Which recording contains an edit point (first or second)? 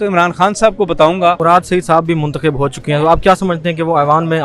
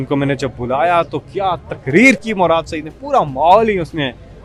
first